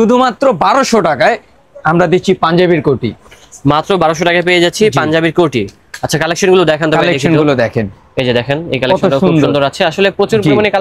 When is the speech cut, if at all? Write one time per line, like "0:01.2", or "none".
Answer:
none